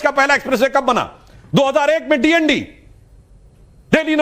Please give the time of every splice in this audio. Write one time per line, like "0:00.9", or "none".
0:01.2